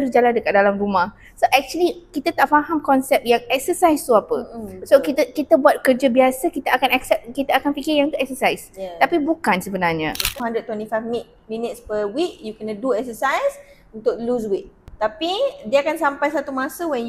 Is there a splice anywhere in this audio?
yes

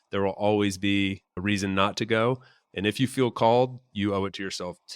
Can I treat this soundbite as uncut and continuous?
no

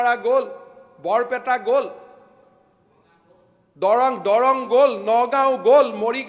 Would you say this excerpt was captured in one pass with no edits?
yes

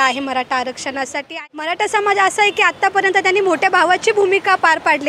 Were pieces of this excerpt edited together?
yes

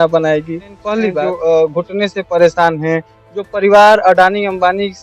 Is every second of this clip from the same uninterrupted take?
no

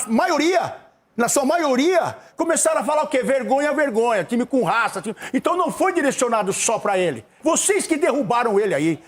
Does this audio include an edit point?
yes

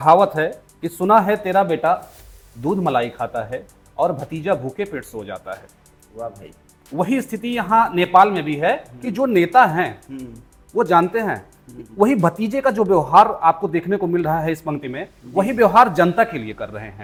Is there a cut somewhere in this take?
no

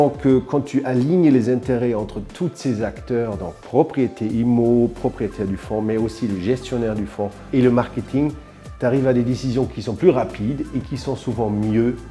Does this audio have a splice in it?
no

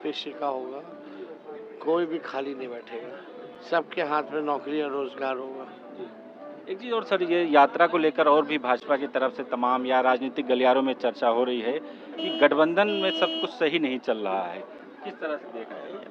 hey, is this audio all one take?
yes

